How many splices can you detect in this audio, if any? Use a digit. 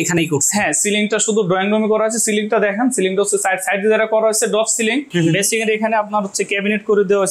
1